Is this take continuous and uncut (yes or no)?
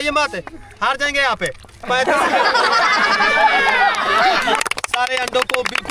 no